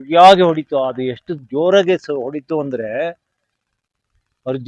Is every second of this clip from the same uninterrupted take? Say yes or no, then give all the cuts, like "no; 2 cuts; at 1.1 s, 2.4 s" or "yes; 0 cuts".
yes; 0 cuts